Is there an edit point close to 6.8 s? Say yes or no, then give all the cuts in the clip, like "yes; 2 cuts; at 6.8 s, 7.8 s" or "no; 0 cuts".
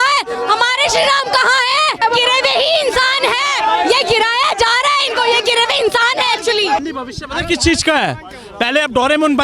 yes; 2 cuts; at 2.0 s, 6.8 s